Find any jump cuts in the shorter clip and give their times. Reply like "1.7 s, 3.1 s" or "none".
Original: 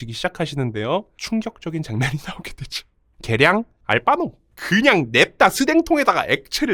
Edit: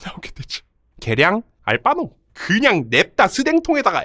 none